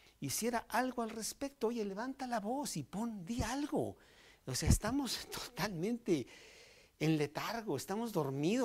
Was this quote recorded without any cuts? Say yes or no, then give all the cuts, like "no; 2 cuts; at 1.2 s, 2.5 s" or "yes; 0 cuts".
yes; 0 cuts